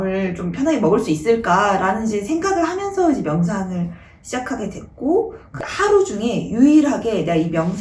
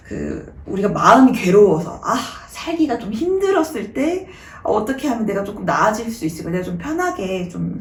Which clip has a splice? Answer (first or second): first